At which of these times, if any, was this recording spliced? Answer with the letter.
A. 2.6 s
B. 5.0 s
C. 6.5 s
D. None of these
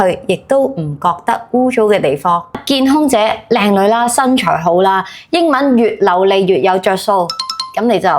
A